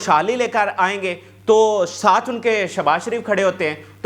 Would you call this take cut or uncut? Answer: uncut